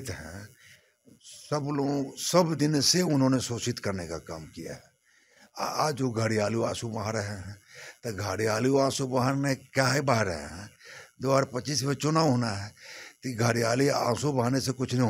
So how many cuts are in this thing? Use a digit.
0